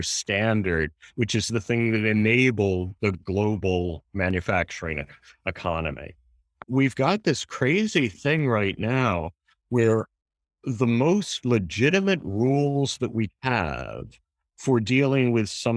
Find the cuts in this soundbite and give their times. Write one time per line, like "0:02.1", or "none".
0:06.6